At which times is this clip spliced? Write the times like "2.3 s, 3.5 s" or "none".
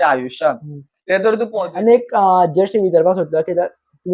1.6 s